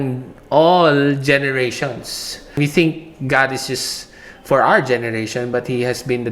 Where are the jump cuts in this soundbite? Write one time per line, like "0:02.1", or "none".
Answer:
0:02.6